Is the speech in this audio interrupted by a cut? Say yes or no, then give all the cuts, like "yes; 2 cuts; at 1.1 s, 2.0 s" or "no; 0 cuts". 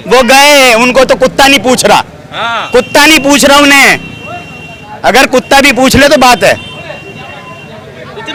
no; 0 cuts